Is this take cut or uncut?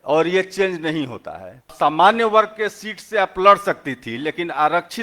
cut